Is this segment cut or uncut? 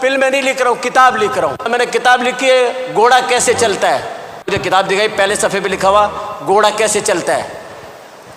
cut